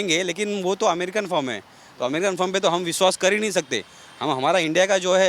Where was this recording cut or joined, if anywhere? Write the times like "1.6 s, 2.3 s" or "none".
none